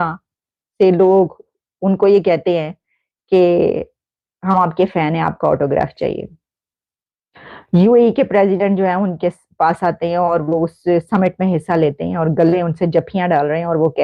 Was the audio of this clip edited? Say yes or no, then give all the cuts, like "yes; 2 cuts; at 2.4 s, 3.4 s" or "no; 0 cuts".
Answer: no; 0 cuts